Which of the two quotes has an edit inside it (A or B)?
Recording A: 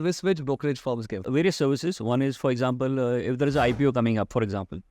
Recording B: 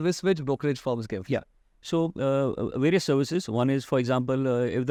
A